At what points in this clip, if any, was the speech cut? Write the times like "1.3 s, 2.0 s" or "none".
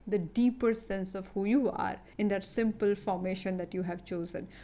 2.0 s